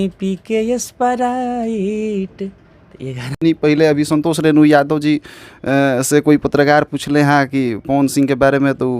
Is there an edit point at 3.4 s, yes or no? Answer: yes